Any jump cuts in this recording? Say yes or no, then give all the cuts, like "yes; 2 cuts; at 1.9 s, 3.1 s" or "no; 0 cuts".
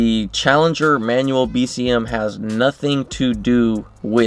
no; 0 cuts